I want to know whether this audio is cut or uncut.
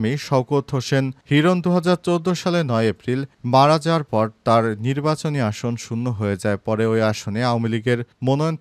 uncut